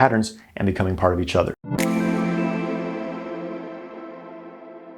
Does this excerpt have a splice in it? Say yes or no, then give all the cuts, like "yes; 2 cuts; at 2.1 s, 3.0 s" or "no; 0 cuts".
yes; 1 cut; at 1.6 s